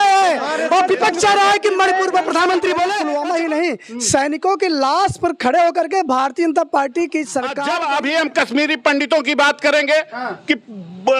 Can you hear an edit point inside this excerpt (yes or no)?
yes